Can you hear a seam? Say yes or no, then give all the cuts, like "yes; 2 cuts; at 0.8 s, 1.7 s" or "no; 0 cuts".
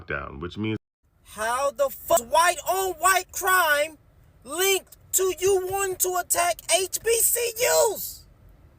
yes; 2 cuts; at 0.8 s, 2.2 s